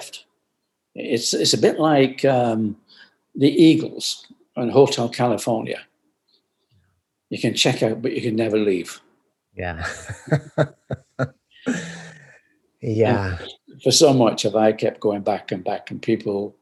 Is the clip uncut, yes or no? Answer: yes